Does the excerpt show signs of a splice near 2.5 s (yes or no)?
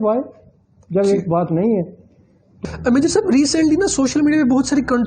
yes